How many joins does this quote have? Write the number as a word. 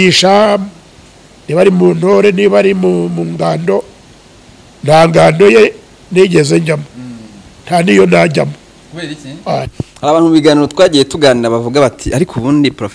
one